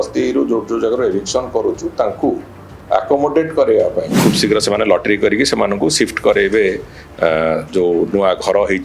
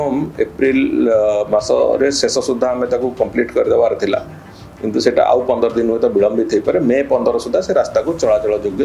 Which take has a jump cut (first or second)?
first